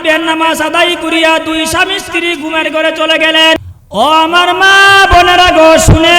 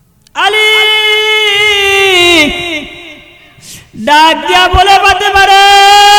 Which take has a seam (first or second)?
first